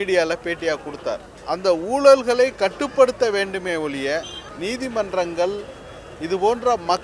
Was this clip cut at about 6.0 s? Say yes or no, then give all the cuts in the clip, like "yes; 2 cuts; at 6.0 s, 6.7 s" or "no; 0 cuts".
no; 2 cuts; at 1.3 s, 4.4 s